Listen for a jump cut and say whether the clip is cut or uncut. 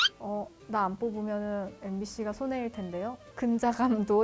cut